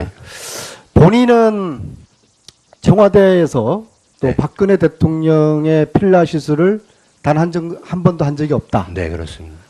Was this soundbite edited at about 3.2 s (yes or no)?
yes